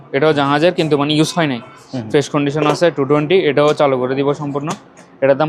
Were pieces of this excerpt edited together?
no; 0 cuts

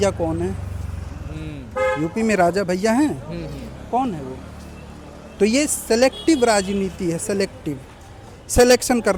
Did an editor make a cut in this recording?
no; 0 cuts

